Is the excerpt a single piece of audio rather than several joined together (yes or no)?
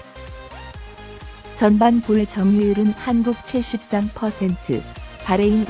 no